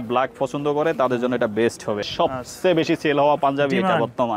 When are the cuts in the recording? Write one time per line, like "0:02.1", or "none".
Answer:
0:02.0